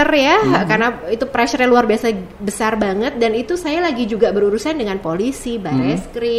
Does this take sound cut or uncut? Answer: uncut